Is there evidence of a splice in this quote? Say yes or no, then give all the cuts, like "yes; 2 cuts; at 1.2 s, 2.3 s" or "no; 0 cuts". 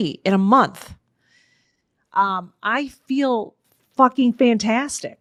no; 0 cuts